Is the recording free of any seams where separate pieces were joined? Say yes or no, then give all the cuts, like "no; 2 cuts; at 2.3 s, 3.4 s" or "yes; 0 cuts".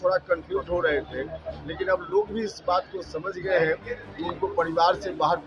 yes; 0 cuts